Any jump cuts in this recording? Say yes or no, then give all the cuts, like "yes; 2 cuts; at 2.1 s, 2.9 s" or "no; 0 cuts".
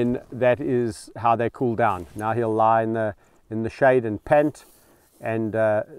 no; 0 cuts